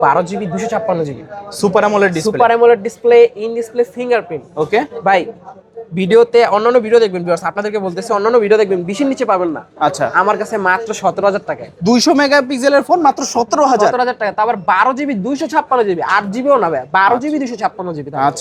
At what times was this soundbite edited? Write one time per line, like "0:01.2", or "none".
none